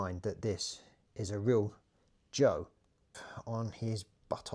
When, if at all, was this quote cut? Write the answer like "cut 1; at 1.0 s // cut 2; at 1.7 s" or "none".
cut 1; at 3.3 s